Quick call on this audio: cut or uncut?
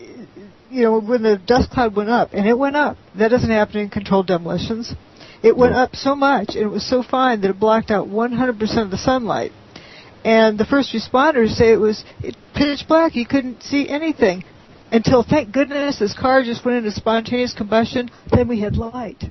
uncut